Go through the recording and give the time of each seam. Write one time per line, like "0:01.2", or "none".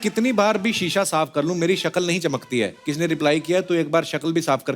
0:02.8